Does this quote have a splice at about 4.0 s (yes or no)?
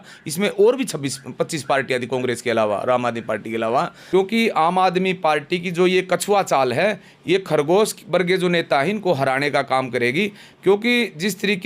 yes